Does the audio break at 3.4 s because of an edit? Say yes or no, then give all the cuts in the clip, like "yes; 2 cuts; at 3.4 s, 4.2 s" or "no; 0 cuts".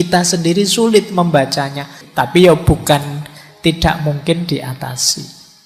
no; 1 cut; at 2.0 s